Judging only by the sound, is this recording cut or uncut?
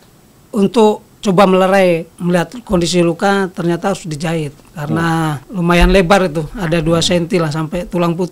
cut